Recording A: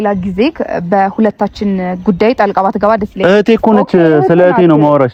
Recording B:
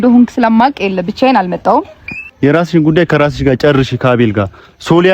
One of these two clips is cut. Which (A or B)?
B